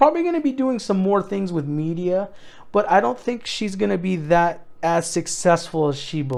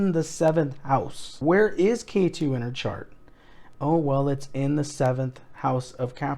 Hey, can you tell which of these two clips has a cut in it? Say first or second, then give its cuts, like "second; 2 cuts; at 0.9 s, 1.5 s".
second; 1 cut; at 1.4 s